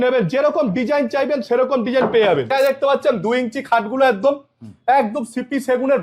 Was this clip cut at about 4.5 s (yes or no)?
no